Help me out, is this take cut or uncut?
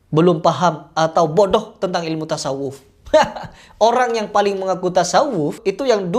uncut